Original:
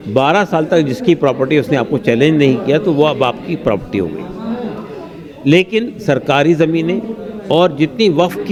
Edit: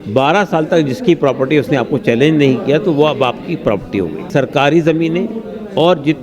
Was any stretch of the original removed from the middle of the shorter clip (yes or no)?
yes